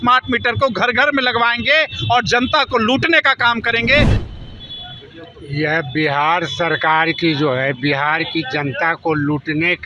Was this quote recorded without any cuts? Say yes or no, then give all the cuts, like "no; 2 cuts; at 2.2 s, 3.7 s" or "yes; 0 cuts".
no; 1 cut; at 4.2 s